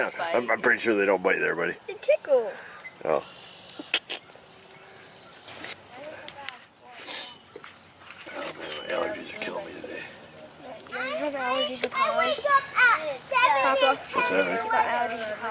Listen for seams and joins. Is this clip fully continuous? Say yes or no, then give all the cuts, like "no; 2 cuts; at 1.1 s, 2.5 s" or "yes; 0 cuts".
yes; 0 cuts